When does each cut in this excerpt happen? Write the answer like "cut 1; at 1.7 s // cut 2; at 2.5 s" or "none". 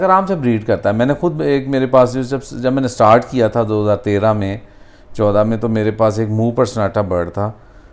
none